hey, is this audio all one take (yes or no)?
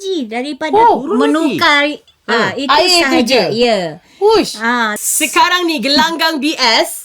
no